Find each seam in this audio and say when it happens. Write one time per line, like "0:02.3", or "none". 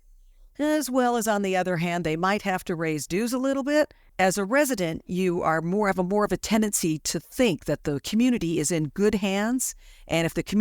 0:04.0